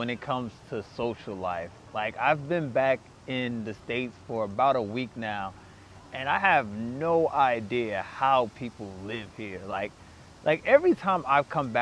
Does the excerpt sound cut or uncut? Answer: uncut